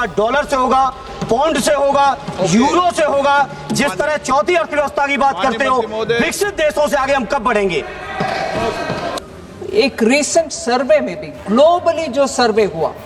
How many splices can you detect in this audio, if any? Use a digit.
1